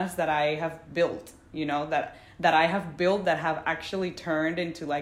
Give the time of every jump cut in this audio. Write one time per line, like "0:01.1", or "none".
none

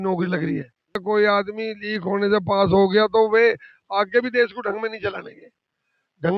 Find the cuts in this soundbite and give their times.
0:01.0

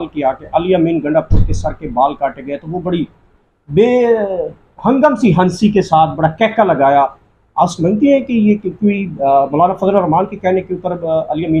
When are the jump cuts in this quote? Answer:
none

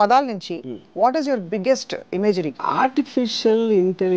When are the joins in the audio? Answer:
0:02.7

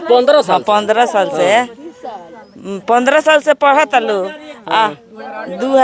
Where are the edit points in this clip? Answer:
none

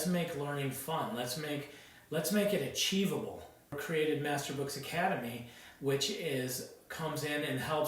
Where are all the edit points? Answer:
0:03.8

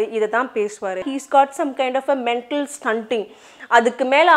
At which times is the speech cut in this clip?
0:01.1

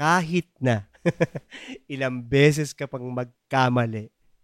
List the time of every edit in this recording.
none

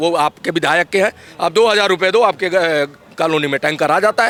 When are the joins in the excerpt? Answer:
none

